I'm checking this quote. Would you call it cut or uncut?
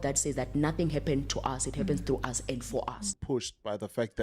cut